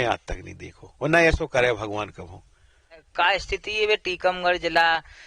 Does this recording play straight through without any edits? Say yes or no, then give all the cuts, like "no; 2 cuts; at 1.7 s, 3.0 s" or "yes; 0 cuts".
no; 1 cut; at 3.1 s